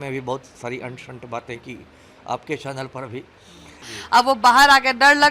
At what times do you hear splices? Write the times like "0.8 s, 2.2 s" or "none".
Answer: 3.9 s